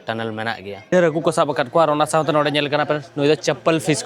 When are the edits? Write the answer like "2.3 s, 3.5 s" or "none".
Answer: 0.9 s